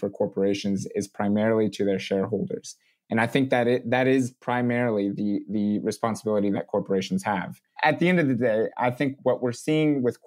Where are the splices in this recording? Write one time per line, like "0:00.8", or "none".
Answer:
0:07.7
0:09.2